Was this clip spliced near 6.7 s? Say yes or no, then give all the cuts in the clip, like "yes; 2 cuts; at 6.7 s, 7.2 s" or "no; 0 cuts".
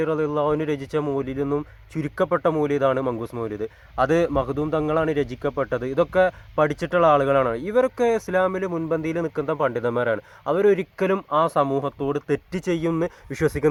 no; 0 cuts